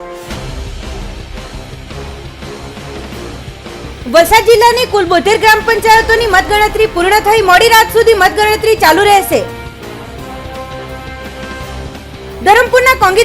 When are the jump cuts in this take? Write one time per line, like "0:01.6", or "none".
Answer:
0:04.0